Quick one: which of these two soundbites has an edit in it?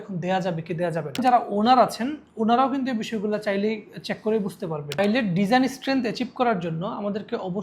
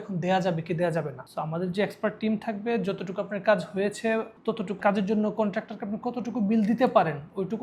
first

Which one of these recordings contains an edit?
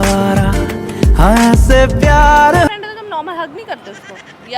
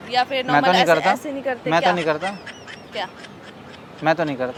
first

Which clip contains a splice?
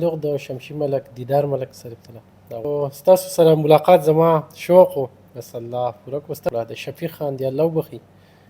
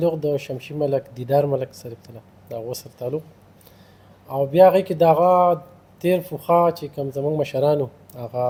first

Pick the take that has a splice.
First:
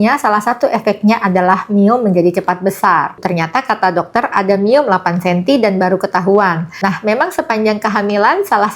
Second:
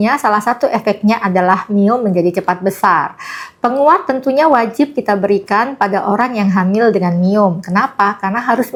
first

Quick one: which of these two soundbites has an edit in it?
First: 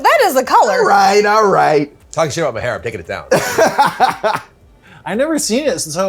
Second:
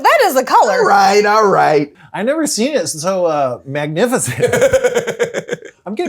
second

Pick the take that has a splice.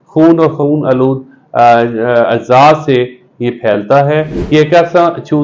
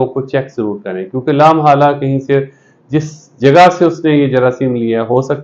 first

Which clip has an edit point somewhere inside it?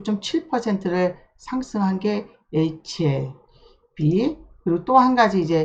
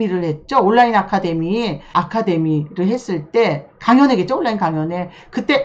second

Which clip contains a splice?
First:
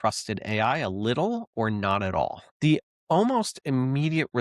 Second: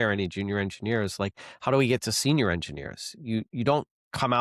first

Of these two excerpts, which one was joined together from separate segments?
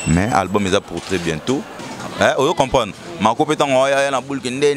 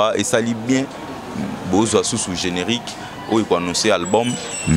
first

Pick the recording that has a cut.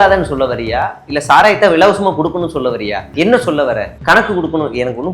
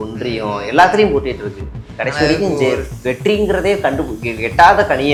first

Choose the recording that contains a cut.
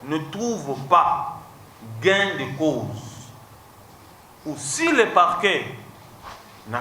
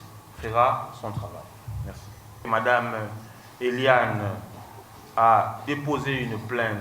second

